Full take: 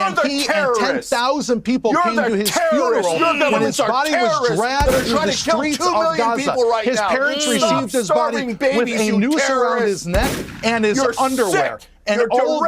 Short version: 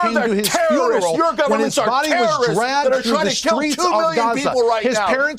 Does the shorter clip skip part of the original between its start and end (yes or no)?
no